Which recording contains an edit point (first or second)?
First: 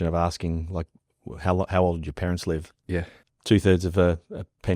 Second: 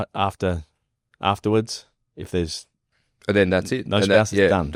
first